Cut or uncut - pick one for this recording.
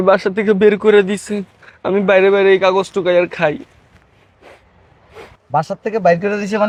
uncut